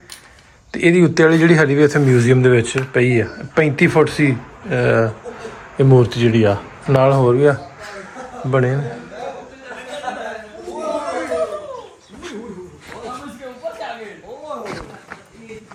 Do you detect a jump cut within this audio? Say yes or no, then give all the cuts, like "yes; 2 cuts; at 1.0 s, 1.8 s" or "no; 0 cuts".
no; 0 cuts